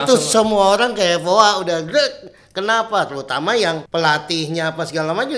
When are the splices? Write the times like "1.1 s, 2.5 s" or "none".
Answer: 3.8 s